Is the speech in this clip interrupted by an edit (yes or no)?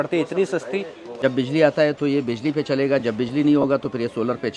yes